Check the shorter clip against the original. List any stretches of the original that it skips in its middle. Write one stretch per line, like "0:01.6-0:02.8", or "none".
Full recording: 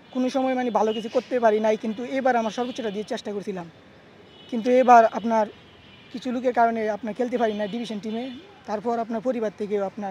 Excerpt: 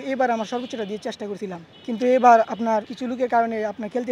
0:03.7-0:04.3
0:05.6-0:06.2